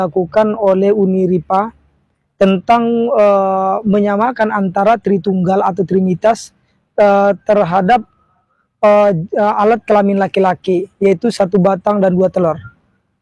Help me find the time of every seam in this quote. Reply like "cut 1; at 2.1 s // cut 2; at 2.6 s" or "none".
none